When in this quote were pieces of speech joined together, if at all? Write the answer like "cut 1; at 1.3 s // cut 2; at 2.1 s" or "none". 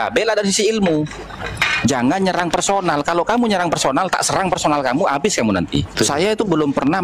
cut 1; at 5.9 s